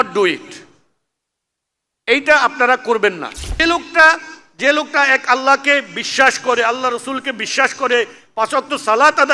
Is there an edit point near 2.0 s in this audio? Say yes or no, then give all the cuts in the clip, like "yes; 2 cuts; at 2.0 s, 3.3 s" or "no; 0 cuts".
no; 1 cut; at 3.6 s